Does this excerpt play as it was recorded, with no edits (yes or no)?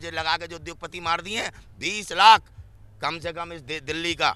yes